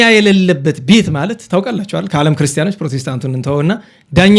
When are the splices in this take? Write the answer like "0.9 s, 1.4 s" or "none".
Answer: none